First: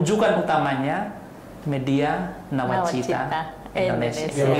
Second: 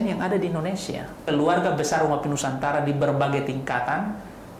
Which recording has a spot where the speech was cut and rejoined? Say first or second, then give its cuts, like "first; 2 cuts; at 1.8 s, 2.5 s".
second; 1 cut; at 1.2 s